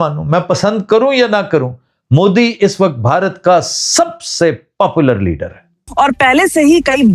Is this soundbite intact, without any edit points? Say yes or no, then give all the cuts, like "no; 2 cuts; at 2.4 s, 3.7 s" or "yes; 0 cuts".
no; 1 cut; at 5.8 s